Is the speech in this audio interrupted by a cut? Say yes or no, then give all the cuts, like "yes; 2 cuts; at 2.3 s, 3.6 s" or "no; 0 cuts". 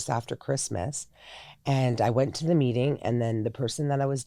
no; 0 cuts